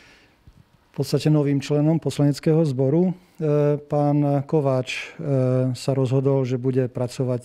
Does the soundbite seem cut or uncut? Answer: uncut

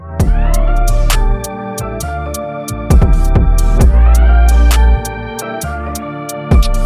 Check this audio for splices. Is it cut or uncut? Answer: uncut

